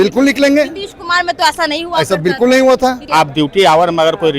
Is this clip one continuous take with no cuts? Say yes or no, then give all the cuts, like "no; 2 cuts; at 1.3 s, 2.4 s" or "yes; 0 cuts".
no; 1 cut; at 3.0 s